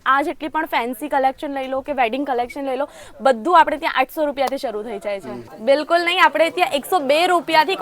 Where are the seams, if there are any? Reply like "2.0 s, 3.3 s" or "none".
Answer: 5.4 s